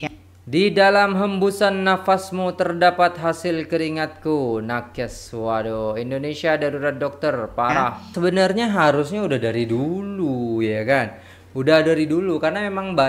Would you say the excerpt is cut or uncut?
cut